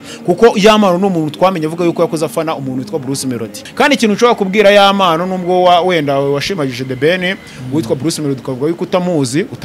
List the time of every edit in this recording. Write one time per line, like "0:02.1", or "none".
0:03.6